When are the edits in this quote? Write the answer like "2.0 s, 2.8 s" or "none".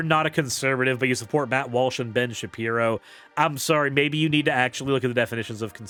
none